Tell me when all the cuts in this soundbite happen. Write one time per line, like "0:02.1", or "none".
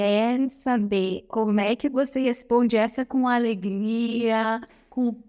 none